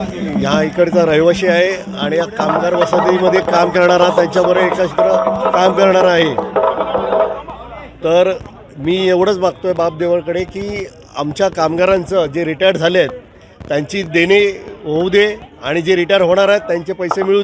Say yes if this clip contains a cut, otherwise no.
no